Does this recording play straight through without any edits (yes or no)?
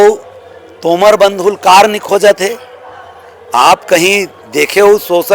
yes